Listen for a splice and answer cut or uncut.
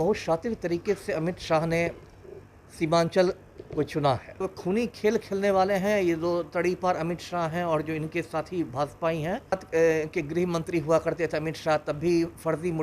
cut